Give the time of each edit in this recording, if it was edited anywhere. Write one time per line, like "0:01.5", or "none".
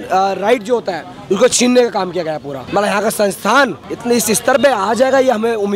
0:02.5
0:03.9